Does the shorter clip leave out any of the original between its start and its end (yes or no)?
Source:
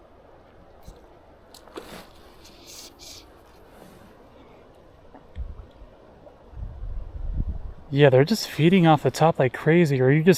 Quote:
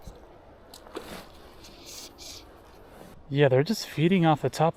yes